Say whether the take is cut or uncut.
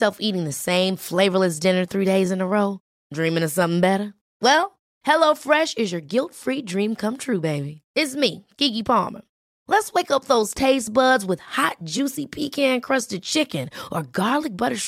uncut